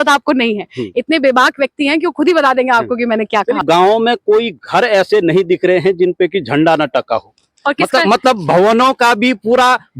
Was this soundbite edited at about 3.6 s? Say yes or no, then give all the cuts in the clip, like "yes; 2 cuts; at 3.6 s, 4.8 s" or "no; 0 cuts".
yes; 1 cut; at 3.6 s